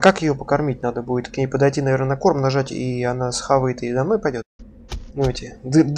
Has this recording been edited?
yes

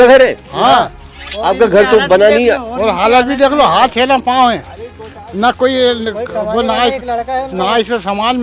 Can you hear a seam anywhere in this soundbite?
no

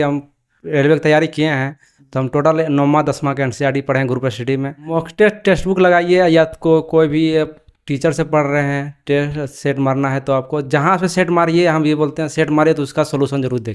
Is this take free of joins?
no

